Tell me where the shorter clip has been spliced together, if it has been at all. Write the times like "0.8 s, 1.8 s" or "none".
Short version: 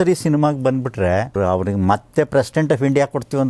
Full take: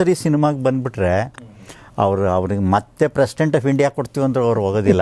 1.3 s